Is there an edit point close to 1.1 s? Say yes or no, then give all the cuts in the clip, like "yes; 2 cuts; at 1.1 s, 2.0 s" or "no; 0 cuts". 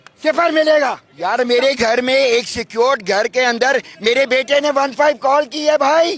yes; 1 cut; at 1.1 s